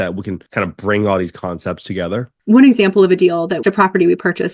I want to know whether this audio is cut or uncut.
cut